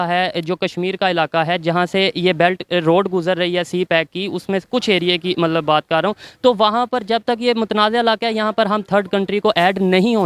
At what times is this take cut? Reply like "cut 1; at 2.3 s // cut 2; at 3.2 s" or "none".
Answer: none